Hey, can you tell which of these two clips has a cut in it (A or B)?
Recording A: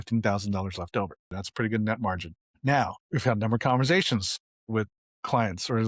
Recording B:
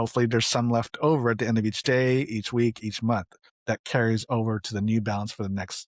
A